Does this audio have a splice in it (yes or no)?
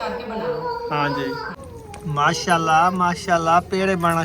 yes